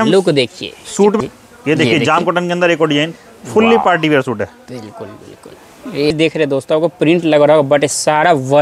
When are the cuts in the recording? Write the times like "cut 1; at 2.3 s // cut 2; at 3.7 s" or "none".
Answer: cut 1; at 1.2 s // cut 2; at 6.1 s